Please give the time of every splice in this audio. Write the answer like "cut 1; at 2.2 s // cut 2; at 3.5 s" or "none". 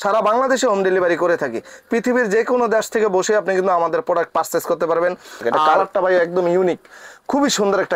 cut 1; at 5.4 s